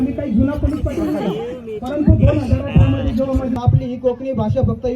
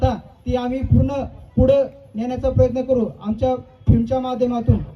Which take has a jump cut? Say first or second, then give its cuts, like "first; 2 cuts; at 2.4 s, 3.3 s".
first; 1 cut; at 3.5 s